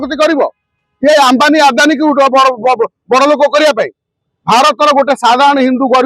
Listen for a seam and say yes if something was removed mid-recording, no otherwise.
no